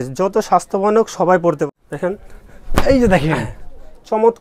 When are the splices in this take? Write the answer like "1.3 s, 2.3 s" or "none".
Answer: 1.7 s